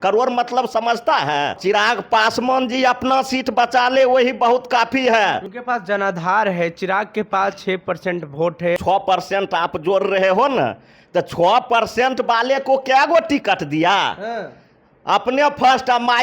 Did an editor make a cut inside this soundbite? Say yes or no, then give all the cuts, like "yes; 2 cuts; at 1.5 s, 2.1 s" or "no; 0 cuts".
yes; 3 cuts; at 1.6 s, 5.5 s, 8.8 s